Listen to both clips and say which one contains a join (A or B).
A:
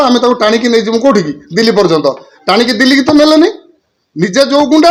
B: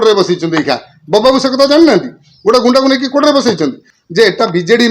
B